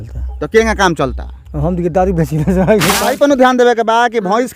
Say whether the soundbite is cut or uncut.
cut